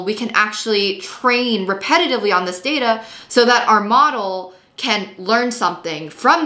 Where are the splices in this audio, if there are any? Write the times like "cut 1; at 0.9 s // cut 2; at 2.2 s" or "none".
none

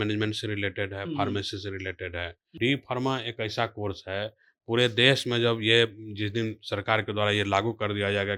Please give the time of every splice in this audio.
cut 1; at 2.4 s

